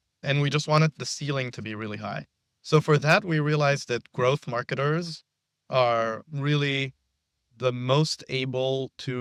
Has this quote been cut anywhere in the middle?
no; 0 cuts

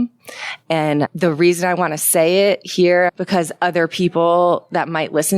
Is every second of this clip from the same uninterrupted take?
no; 2 cuts; at 1.1 s, 3.1 s

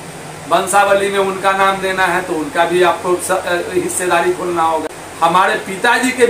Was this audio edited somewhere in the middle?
yes; 1 cut; at 5.0 s

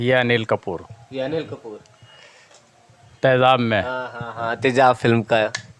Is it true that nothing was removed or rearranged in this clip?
yes; 0 cuts

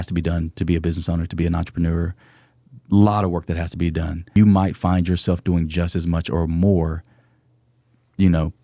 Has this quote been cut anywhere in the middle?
yes; 1 cut; at 4.4 s

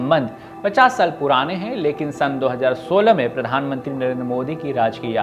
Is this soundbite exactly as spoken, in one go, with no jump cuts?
yes; 0 cuts

